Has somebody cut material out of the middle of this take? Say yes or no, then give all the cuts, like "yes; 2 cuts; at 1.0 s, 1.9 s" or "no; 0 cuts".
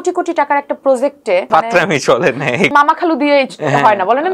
yes; 2 cuts; at 1.5 s, 2.7 s